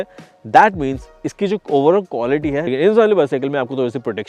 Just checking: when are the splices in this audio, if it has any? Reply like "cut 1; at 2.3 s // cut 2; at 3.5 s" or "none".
cut 1; at 2.7 s